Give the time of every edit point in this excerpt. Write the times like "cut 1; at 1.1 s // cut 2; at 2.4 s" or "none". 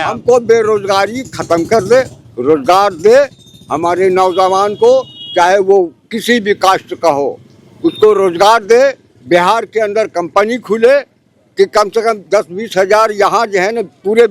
none